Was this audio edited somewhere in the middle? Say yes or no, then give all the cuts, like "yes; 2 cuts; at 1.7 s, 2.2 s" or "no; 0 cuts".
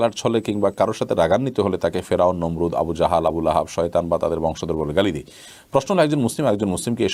no; 0 cuts